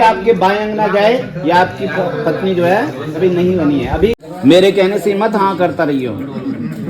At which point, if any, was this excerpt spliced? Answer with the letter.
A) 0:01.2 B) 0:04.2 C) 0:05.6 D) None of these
B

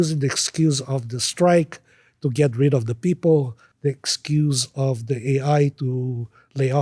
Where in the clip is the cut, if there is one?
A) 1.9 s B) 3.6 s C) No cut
B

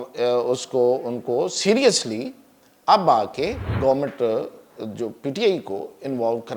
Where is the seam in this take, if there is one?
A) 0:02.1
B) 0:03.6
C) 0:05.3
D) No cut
B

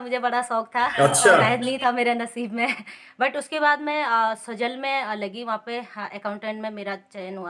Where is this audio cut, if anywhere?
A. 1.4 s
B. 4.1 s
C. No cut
A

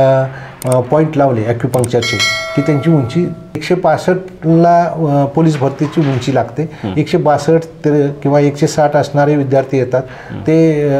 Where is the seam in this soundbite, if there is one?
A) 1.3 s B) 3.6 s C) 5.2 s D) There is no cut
B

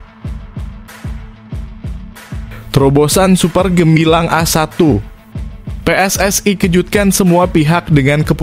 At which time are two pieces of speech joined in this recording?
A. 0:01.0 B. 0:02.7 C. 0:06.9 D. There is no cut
B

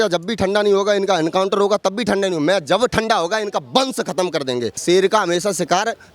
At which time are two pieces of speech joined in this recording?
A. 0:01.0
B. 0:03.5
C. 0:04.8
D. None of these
C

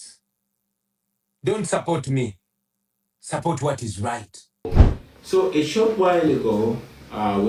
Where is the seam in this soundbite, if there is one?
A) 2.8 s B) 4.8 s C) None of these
B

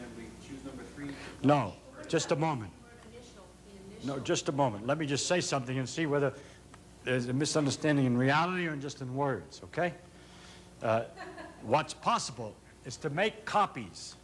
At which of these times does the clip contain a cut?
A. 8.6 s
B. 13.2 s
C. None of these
B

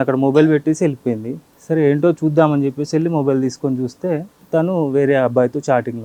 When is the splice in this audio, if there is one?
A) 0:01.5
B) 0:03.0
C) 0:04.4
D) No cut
D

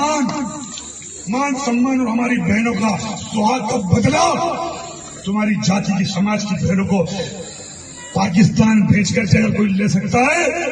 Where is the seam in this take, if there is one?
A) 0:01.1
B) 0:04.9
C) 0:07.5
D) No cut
D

